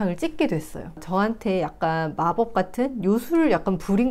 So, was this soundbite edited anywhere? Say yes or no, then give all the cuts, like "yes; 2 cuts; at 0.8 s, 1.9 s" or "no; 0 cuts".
yes; 1 cut; at 1.0 s